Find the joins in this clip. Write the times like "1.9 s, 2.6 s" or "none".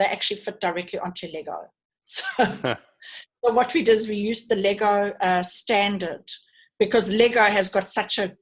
none